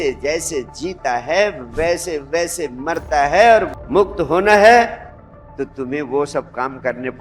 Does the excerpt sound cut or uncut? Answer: cut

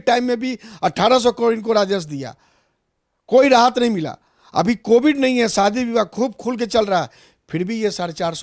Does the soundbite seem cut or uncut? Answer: uncut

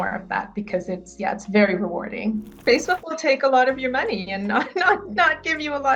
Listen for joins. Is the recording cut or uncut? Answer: cut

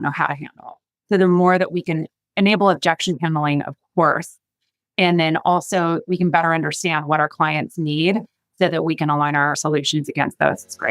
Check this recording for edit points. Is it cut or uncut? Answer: cut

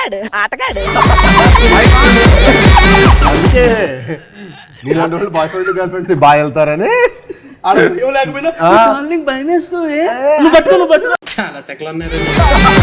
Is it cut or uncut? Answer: cut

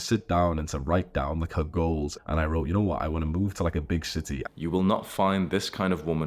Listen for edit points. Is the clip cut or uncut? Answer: cut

